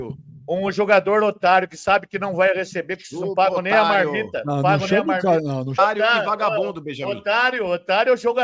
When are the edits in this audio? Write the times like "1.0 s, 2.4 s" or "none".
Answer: 5.7 s